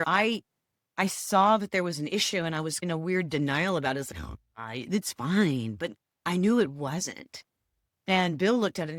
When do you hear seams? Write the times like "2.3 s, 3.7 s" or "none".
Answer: none